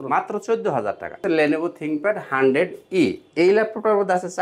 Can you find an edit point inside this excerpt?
yes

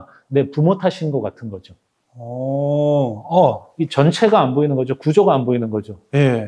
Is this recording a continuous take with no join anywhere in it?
no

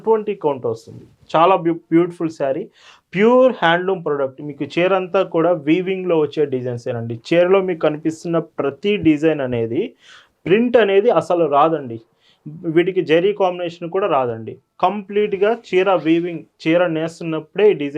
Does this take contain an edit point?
no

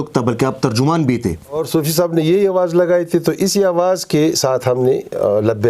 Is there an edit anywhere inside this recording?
yes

